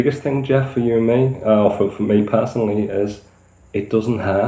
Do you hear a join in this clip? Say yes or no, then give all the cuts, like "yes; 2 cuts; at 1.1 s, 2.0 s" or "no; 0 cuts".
no; 0 cuts